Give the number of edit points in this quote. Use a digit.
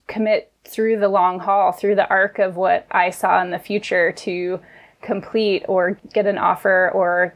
0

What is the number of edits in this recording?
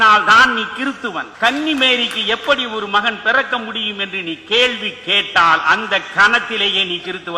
1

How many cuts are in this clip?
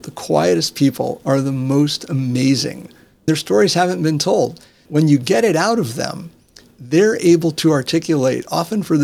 3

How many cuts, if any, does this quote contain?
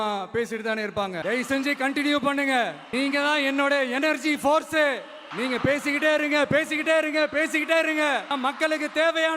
1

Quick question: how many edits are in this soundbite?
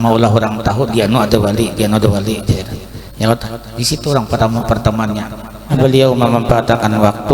1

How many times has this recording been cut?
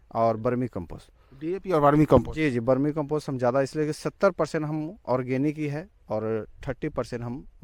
0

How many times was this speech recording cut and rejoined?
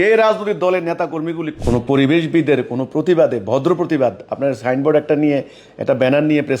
1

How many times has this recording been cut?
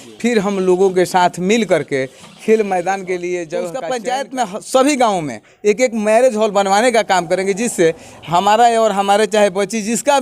1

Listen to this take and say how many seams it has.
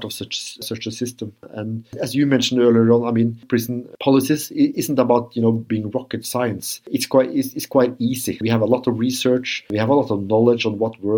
2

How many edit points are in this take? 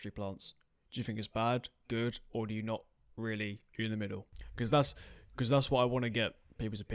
1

